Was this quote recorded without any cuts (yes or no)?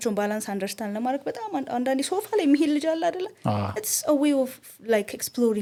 yes